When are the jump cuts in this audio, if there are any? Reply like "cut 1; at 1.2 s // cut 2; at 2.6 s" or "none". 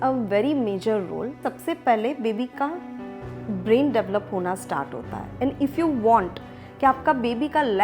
cut 1; at 1.4 s